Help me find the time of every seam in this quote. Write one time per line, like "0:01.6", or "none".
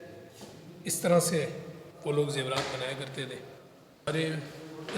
0:04.1